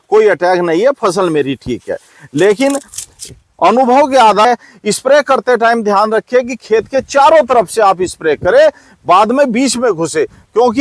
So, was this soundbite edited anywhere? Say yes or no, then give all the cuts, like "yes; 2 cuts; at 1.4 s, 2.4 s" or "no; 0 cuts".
yes; 1 cut; at 4.4 s